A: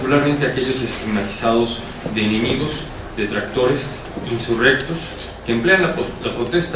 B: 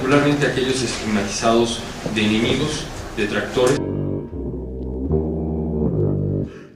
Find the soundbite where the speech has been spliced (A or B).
A